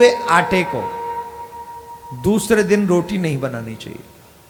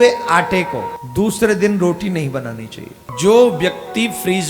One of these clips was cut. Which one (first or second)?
second